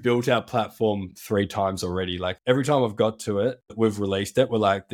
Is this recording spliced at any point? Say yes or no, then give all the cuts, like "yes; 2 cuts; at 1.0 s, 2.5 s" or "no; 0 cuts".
yes; 2 cuts; at 2.3 s, 3.7 s